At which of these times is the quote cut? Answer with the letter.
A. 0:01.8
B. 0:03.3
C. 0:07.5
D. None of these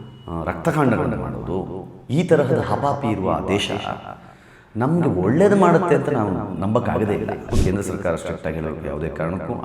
C